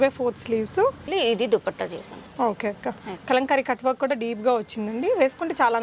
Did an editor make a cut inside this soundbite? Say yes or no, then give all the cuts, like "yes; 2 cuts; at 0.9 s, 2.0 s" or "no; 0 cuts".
yes; 1 cut; at 1.1 s